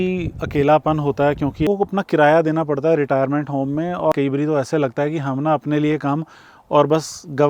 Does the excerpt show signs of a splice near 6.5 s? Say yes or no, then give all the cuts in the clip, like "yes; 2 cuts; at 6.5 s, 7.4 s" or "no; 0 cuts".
no; 2 cuts; at 1.7 s, 4.1 s